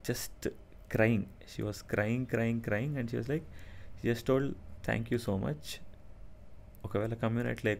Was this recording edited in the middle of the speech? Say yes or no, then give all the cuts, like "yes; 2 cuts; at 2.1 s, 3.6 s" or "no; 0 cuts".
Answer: no; 0 cuts